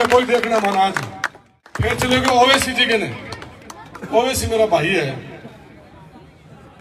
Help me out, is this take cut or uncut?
cut